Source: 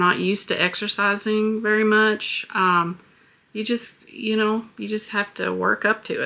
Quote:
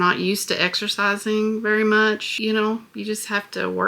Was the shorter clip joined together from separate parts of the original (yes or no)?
yes